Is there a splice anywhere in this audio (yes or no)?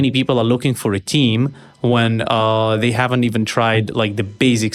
no